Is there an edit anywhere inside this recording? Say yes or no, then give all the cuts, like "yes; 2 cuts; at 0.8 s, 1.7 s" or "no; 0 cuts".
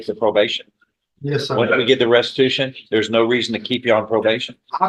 no; 0 cuts